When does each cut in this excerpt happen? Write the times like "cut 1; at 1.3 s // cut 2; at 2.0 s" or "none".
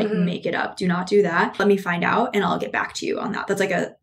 cut 1; at 1.6 s